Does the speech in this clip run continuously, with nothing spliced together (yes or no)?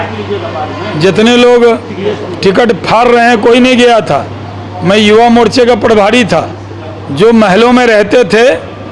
yes